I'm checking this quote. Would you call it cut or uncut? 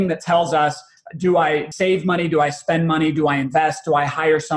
cut